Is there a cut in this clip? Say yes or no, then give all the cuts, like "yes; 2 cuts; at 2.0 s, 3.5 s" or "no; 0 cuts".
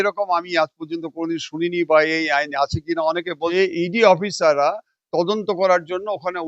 yes; 1 cut; at 3.5 s